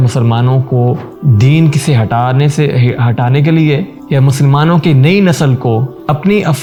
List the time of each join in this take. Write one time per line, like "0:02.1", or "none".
none

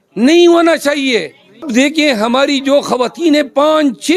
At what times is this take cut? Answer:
0:01.7

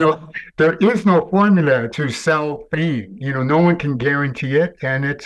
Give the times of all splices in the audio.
0:01.9

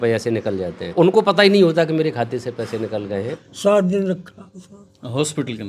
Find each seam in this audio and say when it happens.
0:00.9
0:03.4

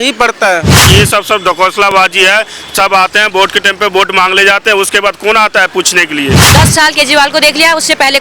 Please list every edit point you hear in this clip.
0:00.8
0:06.4

